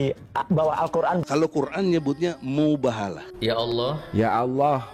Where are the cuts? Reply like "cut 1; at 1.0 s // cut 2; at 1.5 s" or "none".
cut 1; at 1.2 s